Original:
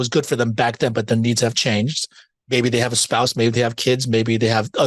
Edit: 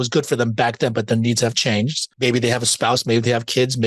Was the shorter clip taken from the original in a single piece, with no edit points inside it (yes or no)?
no